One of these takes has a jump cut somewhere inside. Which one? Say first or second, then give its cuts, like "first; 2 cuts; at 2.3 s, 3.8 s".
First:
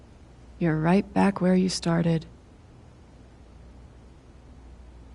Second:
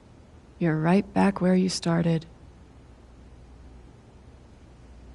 second; 2 cuts; at 2.3 s, 4.1 s